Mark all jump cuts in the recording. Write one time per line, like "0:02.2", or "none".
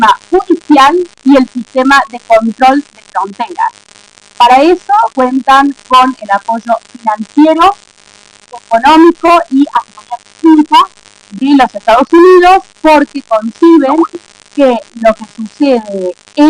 none